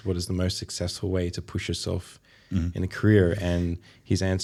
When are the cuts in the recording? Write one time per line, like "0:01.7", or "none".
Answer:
none